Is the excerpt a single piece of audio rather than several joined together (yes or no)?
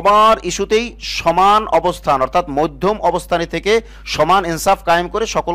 yes